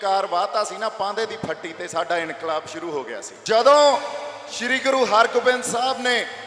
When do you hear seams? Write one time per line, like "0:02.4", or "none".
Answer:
0:03.3